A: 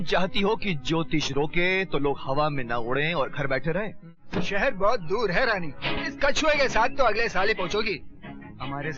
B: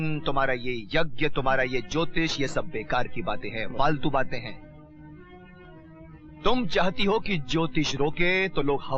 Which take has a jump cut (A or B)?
A